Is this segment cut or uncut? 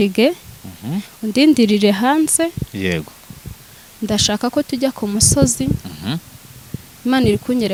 uncut